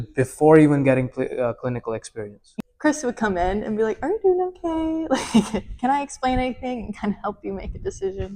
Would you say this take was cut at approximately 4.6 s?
no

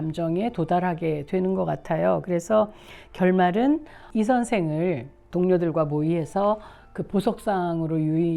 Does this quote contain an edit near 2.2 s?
no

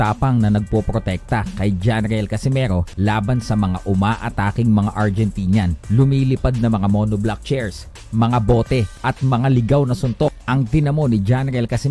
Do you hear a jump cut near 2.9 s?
yes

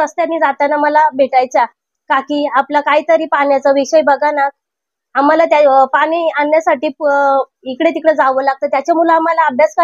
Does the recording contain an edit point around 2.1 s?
no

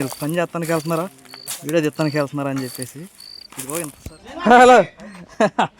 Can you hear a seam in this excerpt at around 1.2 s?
no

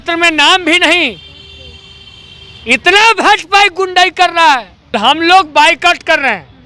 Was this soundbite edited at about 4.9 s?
yes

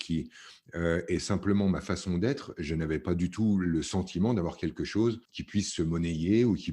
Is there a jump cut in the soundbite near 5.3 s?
yes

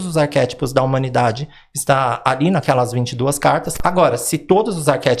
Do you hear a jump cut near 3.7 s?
yes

